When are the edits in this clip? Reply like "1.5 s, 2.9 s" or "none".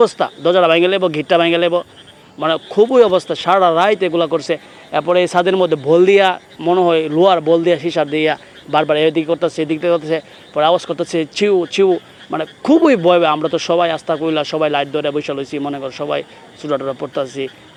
none